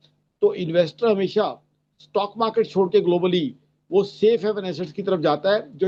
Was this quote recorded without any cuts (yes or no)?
yes